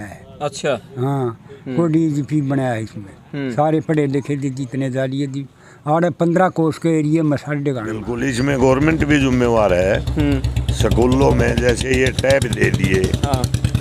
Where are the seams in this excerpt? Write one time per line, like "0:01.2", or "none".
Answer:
0:08.1

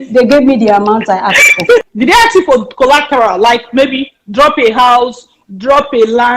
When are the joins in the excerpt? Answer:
0:01.9

